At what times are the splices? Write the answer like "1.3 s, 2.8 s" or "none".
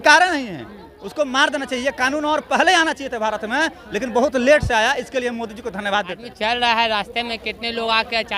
6.2 s

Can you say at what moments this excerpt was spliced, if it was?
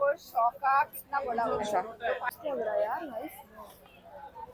2.3 s

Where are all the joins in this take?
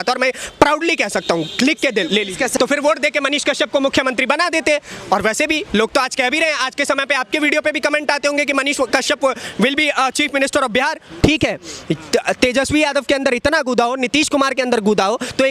2.5 s, 11.1 s

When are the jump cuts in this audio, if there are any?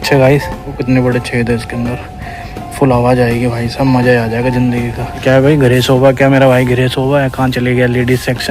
0.8 s, 5.2 s

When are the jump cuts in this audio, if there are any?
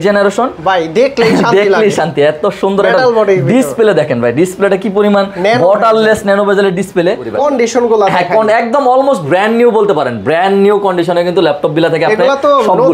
7.3 s

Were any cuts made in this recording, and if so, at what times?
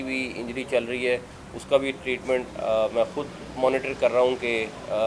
none

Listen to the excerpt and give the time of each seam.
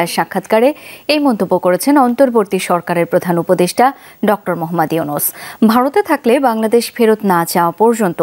none

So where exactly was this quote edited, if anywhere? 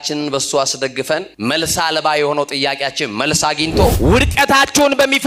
1.3 s, 4.0 s

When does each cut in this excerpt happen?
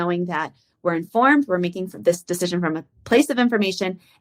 none

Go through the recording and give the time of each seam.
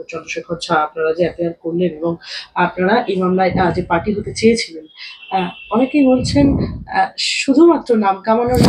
none

